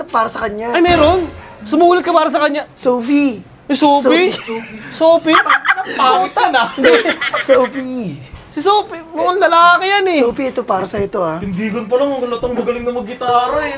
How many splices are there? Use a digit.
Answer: 0